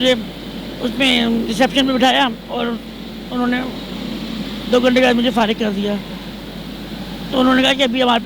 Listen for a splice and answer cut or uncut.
uncut